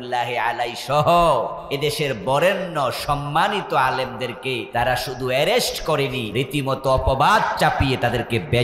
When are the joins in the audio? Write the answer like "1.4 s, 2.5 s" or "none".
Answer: 1.6 s, 4.6 s, 6.2 s